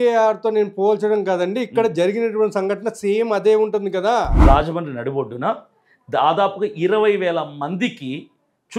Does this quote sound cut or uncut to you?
cut